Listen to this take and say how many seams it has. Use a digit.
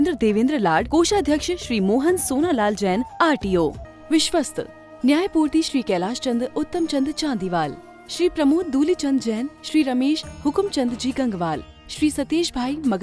1